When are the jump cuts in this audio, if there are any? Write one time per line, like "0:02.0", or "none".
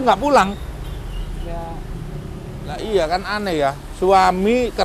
0:02.8